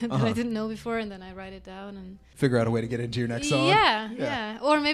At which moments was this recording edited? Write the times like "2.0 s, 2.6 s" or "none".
2.2 s